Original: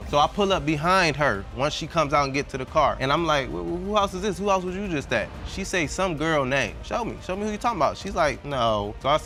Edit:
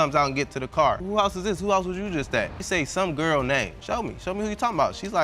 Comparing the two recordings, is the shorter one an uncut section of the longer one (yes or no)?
no